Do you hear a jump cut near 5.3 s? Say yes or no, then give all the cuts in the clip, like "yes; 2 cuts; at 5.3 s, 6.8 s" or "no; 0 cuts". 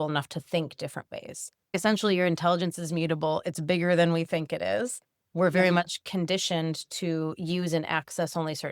no; 1 cut; at 1.7 s